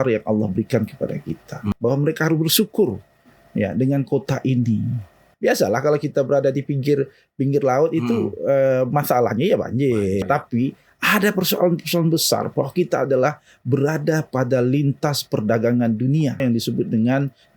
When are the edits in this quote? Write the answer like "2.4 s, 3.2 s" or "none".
1.7 s, 5.3 s, 10.2 s, 16.4 s